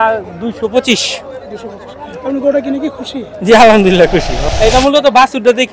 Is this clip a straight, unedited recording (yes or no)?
no